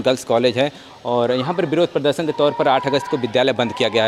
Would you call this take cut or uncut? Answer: uncut